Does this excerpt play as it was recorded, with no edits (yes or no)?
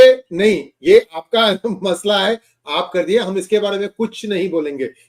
yes